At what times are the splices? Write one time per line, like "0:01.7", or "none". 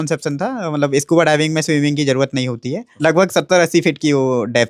0:02.8